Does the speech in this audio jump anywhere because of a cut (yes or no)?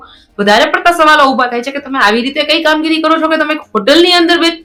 no